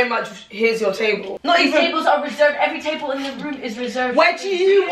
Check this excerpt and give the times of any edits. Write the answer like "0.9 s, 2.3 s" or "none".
1.3 s